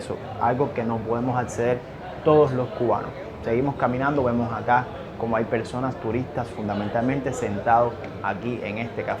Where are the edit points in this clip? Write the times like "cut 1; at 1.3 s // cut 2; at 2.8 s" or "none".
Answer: none